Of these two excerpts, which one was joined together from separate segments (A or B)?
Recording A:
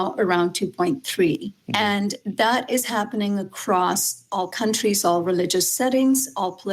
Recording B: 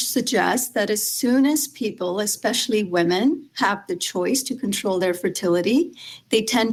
A